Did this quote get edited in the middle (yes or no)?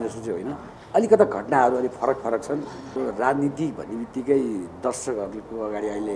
yes